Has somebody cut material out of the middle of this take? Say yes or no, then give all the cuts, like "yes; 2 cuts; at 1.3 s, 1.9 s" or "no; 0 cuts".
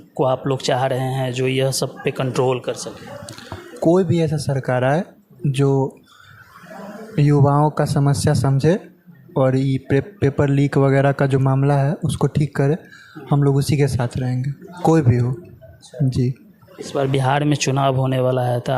no; 0 cuts